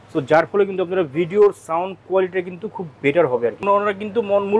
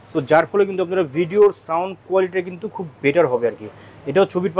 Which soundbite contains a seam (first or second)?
first